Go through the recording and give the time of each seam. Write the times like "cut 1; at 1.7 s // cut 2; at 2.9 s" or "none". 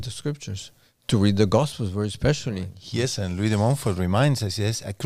cut 1; at 2.7 s